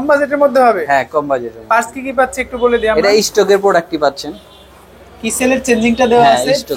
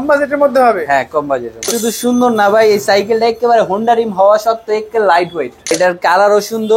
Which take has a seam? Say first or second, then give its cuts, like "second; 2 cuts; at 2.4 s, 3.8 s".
second; 2 cuts; at 1.7 s, 5.7 s